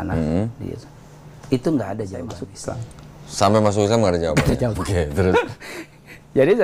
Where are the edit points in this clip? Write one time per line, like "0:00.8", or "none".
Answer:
0:02.4